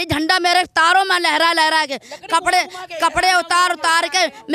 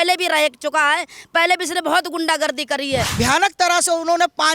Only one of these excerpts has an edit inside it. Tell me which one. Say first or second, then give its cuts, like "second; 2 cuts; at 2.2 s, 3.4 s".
second; 1 cut; at 3.1 s